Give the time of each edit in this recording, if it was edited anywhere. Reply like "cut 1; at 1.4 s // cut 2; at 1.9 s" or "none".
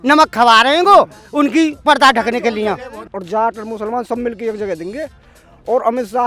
cut 1; at 3.0 s